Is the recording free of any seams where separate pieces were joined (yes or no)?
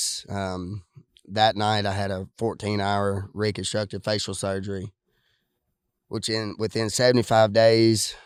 yes